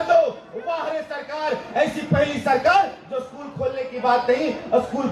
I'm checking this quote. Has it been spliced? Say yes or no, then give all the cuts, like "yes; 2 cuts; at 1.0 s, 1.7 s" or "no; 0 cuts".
no; 0 cuts